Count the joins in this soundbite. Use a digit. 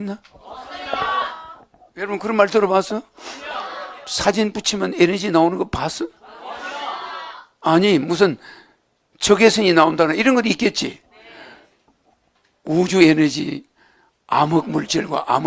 0